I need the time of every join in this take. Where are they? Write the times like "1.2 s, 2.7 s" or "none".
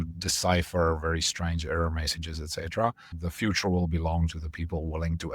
3.1 s